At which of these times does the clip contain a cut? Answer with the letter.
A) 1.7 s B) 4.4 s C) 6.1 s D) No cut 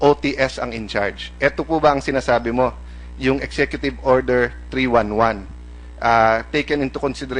B